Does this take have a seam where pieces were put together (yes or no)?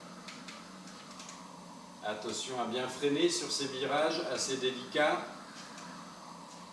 yes